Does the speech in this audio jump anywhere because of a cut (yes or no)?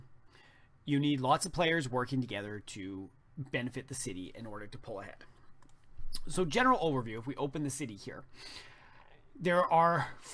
yes